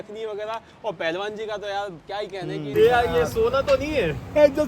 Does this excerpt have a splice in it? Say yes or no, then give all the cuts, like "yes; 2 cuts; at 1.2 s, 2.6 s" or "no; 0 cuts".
yes; 1 cut; at 2.7 s